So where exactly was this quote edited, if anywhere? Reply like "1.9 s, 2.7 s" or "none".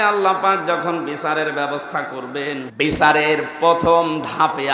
2.7 s